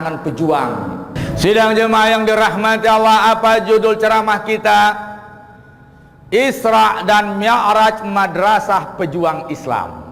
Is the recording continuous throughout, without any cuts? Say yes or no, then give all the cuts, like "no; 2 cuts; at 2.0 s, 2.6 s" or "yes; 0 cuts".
no; 1 cut; at 1.2 s